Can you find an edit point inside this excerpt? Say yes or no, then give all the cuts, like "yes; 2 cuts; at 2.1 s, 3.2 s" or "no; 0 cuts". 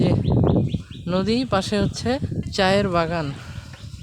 yes; 1 cut; at 2.4 s